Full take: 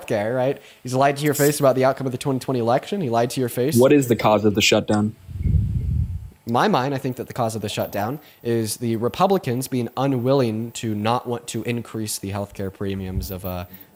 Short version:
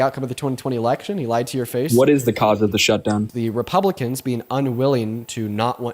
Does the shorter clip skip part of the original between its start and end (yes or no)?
yes